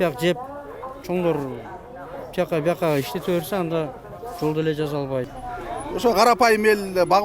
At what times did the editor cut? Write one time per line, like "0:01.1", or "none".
0:05.4